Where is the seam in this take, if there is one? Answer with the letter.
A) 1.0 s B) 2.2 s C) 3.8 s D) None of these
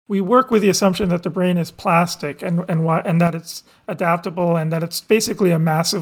D